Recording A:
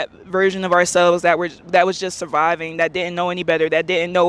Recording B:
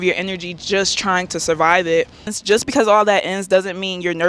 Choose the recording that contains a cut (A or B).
B